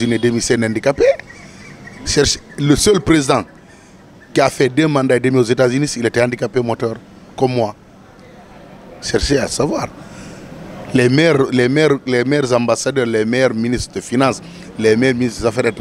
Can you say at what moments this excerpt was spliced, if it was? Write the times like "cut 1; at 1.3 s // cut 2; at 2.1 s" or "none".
none